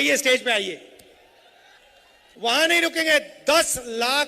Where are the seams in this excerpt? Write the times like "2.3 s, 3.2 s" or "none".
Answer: 2.3 s

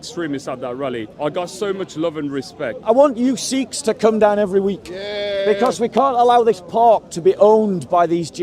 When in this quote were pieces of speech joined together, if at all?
1.1 s, 2.8 s

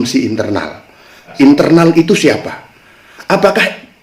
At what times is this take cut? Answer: 1.3 s

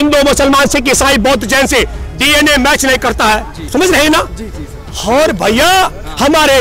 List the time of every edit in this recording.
3.7 s

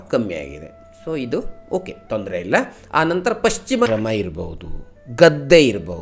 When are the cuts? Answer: 3.9 s

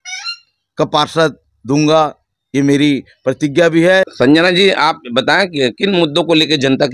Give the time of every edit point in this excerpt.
4.1 s

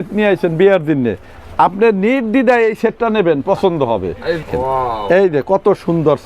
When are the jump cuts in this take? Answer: 4.5 s

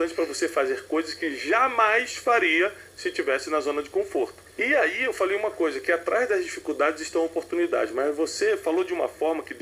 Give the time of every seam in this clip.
4.5 s

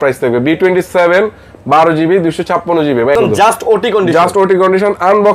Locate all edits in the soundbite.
3.1 s

